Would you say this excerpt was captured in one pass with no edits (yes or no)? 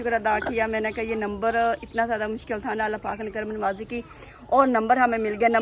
yes